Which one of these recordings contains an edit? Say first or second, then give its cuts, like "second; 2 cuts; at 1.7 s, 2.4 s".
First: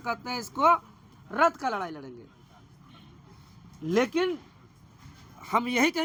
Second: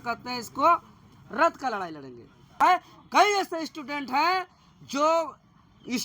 second; 1 cut; at 2.6 s